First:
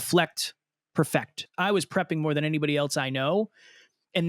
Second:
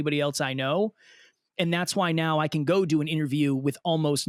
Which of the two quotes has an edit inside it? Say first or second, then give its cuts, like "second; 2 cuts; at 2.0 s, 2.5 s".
first; 1 cut; at 1.5 s